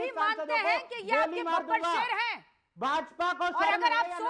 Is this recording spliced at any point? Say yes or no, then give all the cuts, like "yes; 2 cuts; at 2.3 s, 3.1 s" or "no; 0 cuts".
no; 0 cuts